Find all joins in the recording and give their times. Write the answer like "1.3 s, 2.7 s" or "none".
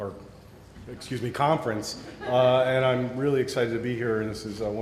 none